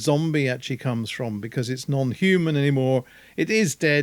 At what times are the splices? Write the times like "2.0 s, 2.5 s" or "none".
none